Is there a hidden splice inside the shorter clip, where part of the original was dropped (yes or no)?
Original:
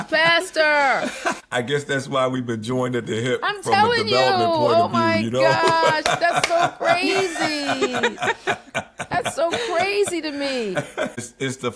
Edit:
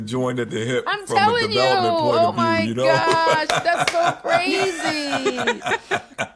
no